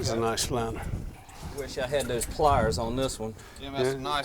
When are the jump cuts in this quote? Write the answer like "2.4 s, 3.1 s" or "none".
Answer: 1.8 s